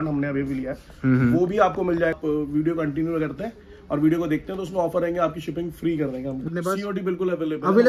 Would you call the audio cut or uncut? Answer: cut